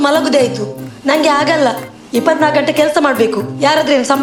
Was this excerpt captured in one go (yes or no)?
yes